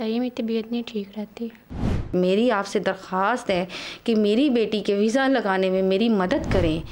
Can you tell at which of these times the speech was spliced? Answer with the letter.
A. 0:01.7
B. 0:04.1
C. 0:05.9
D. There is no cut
A